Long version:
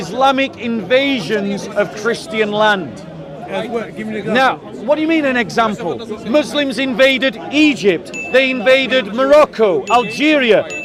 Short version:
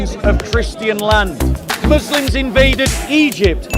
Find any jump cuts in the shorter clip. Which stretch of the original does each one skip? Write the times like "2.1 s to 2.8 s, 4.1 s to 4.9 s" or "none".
3.2 s to 6.1 s